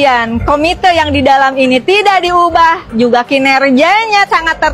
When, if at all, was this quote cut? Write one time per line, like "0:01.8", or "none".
none